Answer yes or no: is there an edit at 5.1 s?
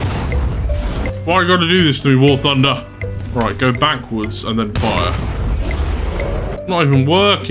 no